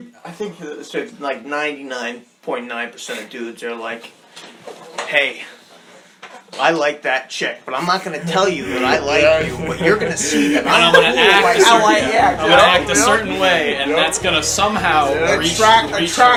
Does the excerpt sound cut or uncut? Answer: uncut